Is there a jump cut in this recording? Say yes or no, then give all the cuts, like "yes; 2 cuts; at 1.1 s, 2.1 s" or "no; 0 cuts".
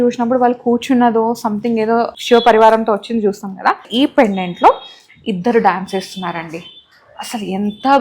yes; 2 cuts; at 2.2 s, 3.9 s